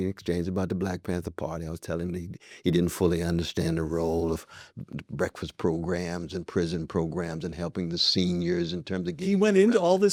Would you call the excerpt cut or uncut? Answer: uncut